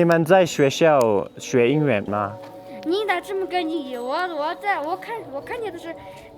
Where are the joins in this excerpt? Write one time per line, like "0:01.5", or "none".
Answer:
0:02.1